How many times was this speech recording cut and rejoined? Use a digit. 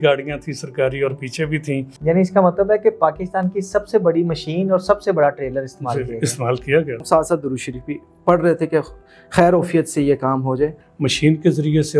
3